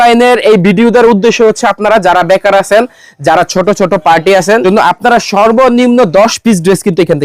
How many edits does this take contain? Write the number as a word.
one